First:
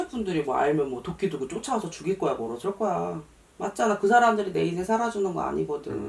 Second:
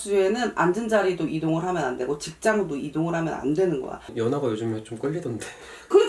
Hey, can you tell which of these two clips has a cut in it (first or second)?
second